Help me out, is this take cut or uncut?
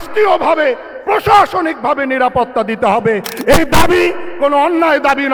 uncut